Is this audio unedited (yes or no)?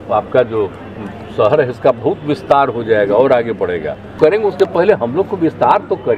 no